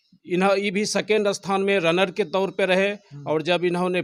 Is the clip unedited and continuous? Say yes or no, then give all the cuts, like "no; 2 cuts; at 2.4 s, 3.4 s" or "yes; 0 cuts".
yes; 0 cuts